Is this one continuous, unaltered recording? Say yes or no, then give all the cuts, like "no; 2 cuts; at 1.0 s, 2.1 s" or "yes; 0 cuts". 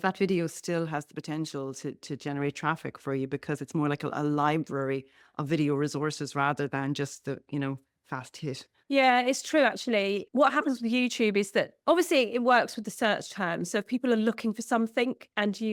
yes; 0 cuts